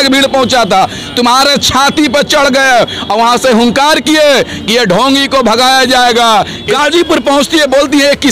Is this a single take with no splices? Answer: no; 1 cut; at 6.6 s

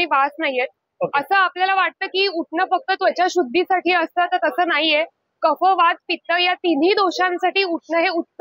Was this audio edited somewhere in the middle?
no; 0 cuts

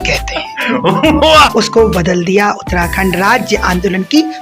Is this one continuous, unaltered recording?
no; 1 cut; at 1.5 s

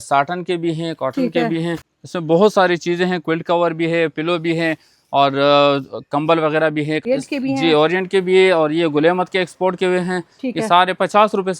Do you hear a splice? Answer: yes; 2 cuts; at 1.9 s, 7.0 s

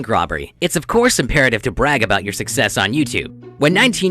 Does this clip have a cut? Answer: no; 0 cuts

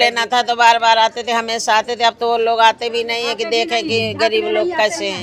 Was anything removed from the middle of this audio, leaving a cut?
no; 0 cuts

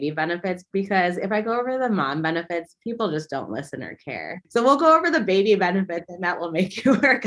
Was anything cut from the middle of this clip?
yes; 1 cut; at 4.2 s

